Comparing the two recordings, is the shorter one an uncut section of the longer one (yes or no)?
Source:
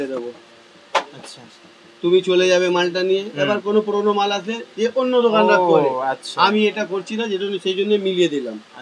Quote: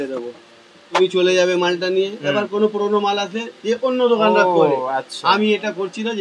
no